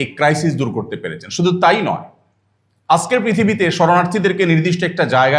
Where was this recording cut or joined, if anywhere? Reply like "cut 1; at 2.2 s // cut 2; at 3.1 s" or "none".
none